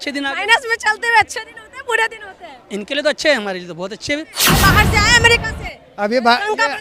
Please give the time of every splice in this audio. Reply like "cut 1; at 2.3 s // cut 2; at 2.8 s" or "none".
cut 1; at 4.4 s